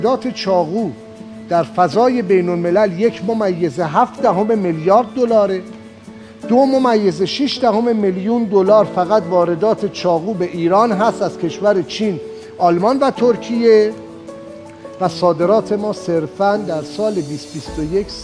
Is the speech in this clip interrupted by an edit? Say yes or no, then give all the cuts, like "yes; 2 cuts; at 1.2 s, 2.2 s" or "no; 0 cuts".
no; 0 cuts